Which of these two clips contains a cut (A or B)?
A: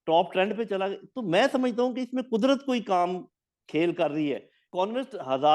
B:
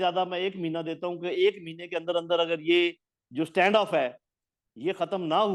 A